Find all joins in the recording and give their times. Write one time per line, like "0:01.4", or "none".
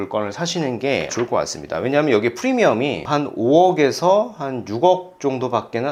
none